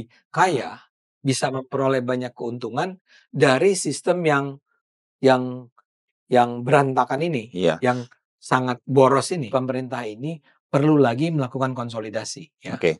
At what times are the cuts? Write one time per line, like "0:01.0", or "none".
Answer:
0:09.5

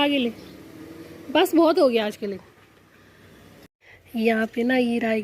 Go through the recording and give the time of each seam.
0:03.5

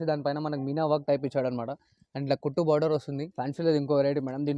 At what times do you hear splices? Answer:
0:03.2

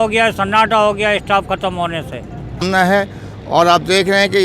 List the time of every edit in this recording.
0:02.6

